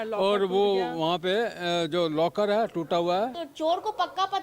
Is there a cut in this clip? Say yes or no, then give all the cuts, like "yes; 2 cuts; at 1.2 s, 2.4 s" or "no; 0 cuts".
yes; 1 cut; at 3.4 s